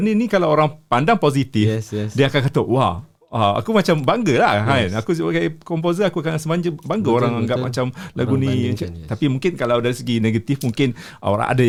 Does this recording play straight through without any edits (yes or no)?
yes